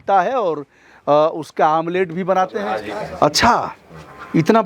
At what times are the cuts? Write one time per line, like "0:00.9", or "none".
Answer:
0:02.6